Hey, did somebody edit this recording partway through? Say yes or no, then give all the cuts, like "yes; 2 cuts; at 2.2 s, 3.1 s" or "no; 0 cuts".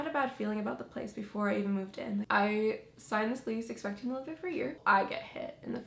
yes; 2 cuts; at 2.3 s, 4.8 s